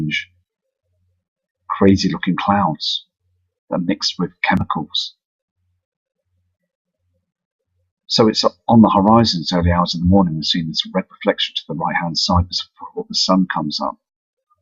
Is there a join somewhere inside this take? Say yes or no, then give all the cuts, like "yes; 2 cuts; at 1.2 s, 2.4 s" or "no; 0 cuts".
yes; 1 cut; at 4.4 s